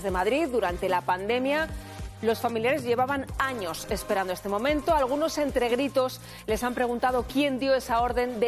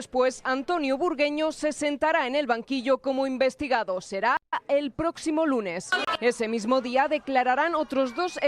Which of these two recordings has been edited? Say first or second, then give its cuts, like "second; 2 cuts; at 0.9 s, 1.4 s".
second; 2 cuts; at 4.5 s, 6.0 s